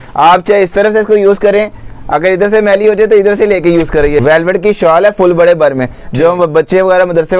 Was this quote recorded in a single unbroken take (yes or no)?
no